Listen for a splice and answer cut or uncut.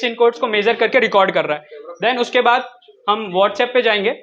uncut